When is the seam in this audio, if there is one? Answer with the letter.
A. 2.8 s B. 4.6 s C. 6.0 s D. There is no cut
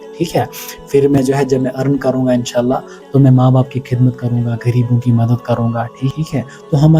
C